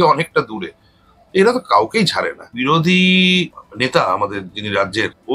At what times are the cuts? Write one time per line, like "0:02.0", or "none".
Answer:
0:02.4